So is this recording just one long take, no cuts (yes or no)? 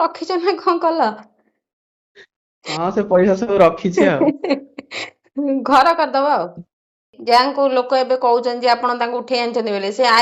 no